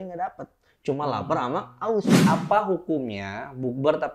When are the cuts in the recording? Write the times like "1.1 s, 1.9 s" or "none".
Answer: 2.1 s